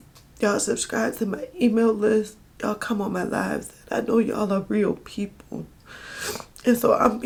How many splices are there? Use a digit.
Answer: 0